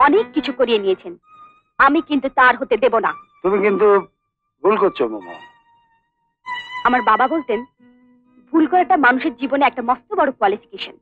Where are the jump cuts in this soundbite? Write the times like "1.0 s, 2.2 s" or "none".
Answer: none